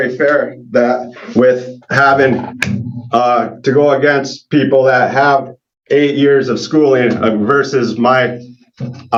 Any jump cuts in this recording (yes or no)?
no